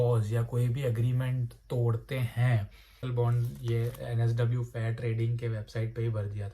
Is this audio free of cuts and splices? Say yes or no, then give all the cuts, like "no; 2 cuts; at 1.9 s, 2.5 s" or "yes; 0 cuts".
no; 1 cut; at 2.8 s